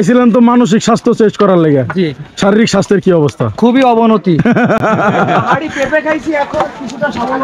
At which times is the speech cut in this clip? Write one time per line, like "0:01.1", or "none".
none